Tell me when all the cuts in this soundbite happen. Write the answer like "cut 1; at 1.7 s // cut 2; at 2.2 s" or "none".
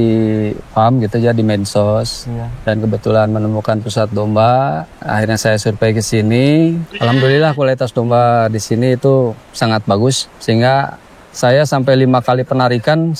cut 1; at 4.9 s // cut 2; at 6.9 s // cut 3; at 9.4 s // cut 4; at 10.3 s